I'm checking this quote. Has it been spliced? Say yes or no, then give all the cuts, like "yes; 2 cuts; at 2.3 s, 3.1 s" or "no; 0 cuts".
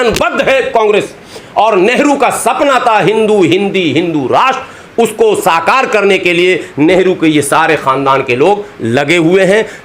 no; 0 cuts